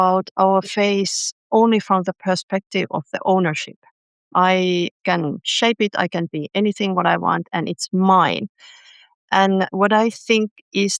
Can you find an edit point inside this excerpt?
yes; 1 cut; at 4.2 s

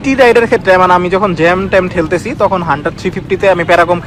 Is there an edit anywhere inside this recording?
no; 0 cuts

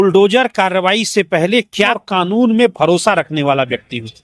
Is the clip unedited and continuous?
no; 1 cut; at 2.0 s

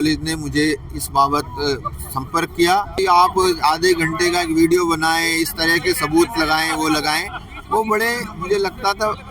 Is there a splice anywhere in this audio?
yes; 1 cut; at 3.0 s

